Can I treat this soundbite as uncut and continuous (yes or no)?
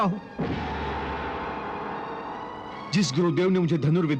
yes